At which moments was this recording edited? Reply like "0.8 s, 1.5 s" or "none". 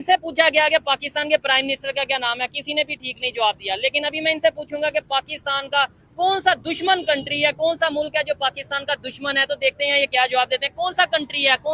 none